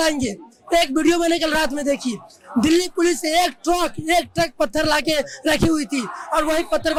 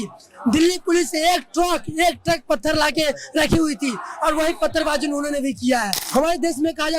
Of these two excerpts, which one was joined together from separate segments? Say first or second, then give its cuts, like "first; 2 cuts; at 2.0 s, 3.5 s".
second; 1 cut; at 6.0 s